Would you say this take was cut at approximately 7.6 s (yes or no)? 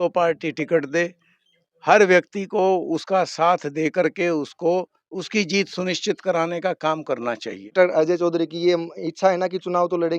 yes